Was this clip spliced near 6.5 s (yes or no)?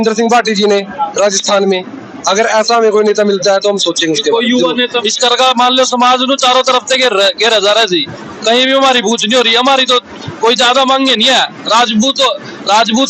no